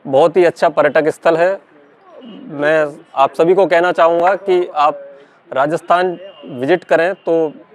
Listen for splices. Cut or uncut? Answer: uncut